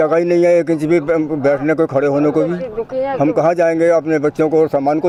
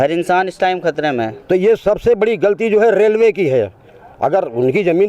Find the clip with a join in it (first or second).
second